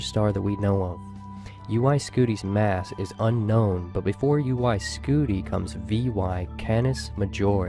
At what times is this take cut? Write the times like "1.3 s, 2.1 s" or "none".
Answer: none